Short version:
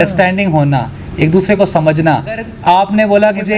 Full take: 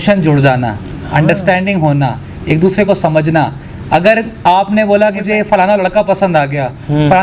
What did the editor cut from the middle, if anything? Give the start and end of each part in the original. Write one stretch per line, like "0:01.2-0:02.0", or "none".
0:03.8-0:04.3